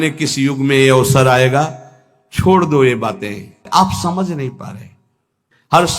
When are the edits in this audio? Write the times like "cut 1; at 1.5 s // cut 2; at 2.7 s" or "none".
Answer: cut 1; at 3.6 s